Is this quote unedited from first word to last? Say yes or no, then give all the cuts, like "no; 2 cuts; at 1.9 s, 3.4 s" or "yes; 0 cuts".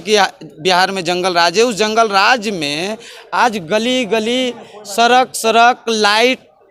yes; 0 cuts